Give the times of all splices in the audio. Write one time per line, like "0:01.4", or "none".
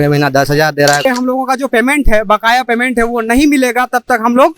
0:01.0